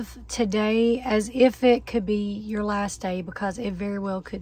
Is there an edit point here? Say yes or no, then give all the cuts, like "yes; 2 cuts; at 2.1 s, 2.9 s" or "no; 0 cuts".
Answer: no; 0 cuts